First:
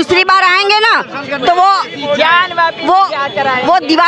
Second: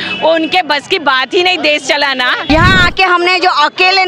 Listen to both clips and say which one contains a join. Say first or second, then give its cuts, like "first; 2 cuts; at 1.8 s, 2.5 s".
second; 1 cut; at 2.5 s